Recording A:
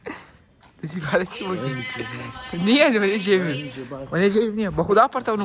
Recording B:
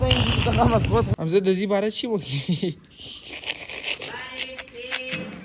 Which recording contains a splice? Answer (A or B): B